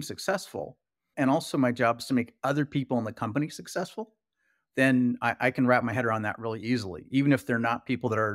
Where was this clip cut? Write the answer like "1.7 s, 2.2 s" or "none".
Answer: 1.1 s